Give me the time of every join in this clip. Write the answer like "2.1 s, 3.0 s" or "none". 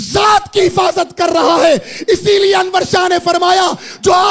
none